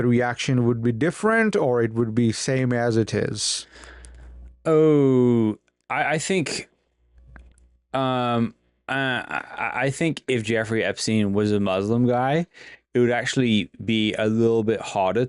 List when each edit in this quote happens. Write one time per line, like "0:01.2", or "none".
none